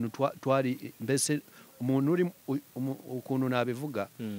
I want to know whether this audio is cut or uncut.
uncut